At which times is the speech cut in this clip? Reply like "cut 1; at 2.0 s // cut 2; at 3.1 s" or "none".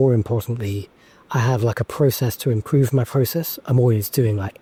none